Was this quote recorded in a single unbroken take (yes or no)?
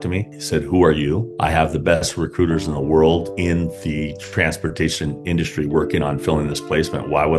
yes